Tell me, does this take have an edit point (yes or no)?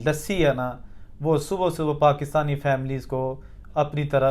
no